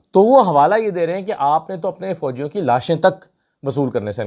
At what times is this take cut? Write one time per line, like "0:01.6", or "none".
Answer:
none